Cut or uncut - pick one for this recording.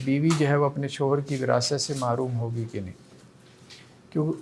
uncut